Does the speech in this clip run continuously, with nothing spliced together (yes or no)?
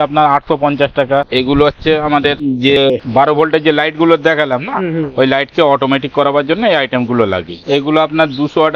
no